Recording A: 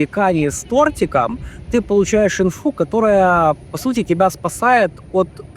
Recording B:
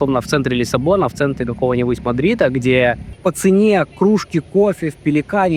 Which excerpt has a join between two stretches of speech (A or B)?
B